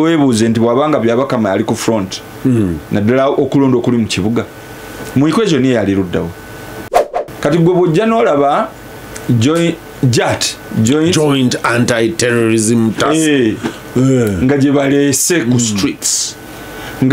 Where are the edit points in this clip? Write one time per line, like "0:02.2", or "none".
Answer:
0:07.2